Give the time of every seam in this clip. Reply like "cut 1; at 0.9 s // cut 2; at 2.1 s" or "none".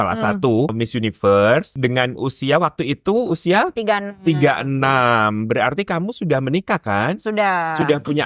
cut 1; at 0.7 s // cut 2; at 1.7 s